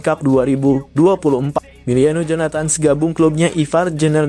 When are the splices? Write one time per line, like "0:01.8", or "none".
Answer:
0:01.5